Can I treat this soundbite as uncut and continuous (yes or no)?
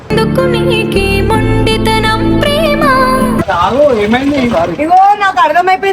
no